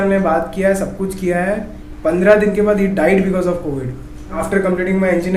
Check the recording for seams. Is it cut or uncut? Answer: cut